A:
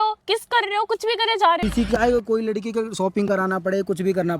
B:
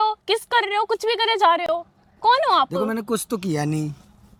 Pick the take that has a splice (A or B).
A